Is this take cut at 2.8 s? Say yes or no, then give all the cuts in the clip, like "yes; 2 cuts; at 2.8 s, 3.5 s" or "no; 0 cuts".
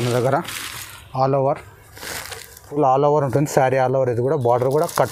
yes; 1 cut; at 2.8 s